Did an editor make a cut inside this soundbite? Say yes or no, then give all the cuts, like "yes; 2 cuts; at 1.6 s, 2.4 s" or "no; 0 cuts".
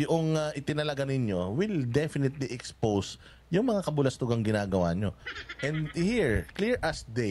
no; 0 cuts